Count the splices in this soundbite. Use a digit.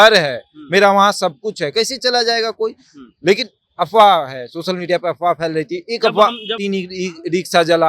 1